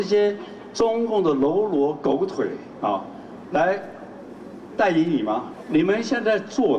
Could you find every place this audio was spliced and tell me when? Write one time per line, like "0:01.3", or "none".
0:05.5